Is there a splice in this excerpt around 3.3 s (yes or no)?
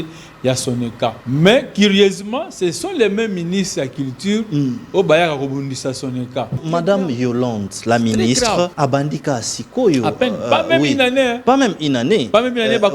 no